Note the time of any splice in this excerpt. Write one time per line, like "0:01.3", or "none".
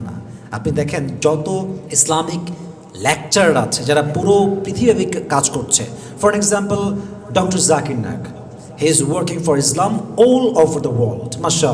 none